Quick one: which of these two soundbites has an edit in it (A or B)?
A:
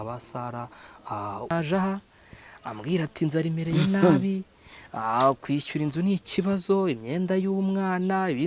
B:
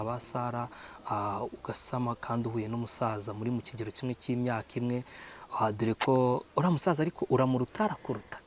A